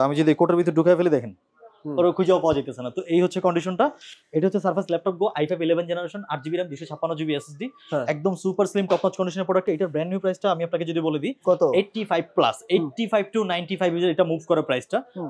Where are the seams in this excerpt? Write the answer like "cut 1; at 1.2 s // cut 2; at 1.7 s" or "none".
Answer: none

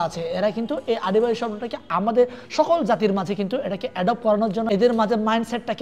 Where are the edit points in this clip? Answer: cut 1; at 4.7 s

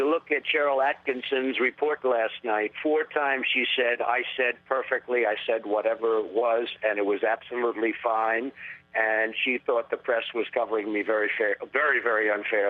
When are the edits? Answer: none

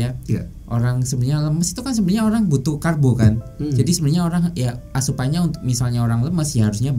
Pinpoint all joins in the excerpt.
none

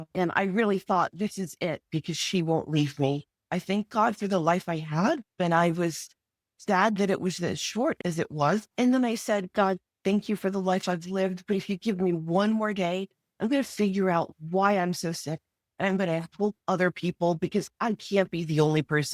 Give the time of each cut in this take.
cut 1; at 3.4 s // cut 2; at 5.3 s // cut 3; at 8.7 s

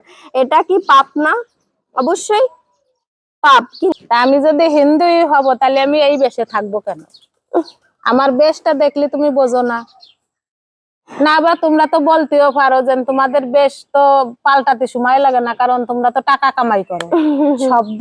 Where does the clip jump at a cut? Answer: cut 1; at 4.0 s

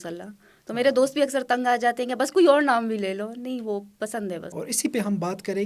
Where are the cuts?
cut 1; at 4.5 s

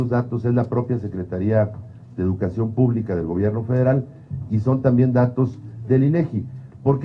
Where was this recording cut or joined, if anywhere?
cut 1; at 5.3 s

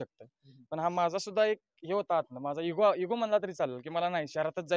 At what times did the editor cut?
none

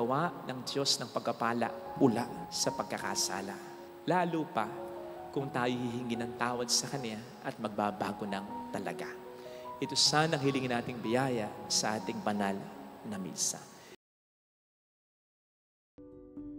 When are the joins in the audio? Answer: none

